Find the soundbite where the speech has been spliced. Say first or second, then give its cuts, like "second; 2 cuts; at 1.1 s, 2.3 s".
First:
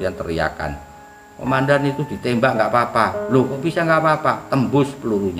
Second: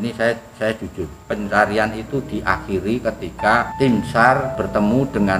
second; 3 cuts; at 1.2 s, 3.7 s, 4.6 s